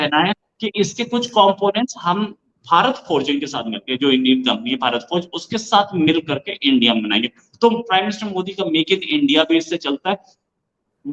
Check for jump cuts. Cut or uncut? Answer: uncut